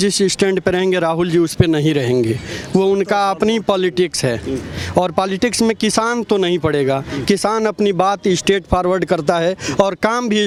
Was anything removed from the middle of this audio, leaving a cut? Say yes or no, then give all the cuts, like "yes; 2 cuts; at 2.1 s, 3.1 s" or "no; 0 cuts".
no; 0 cuts